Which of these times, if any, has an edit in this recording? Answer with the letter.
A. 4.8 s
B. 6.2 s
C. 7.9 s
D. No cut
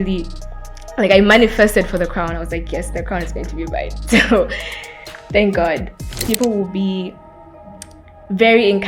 B